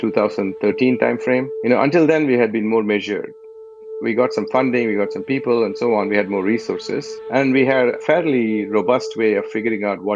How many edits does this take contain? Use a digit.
2